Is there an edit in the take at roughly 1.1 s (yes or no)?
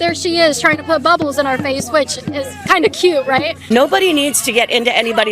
no